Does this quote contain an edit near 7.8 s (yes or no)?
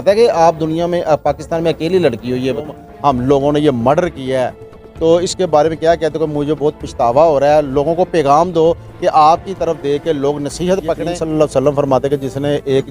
no